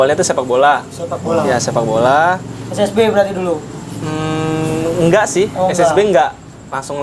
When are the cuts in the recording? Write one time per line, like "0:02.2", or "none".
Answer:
none